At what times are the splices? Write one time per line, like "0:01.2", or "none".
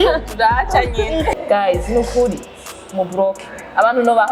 0:01.3